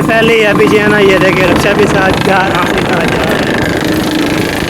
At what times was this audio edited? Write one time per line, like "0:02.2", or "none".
0:02.5